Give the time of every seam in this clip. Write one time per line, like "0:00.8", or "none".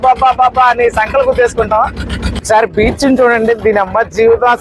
0:02.4